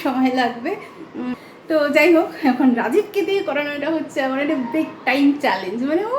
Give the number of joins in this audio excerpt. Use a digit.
1